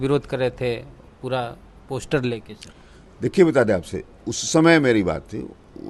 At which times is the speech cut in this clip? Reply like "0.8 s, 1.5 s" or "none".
none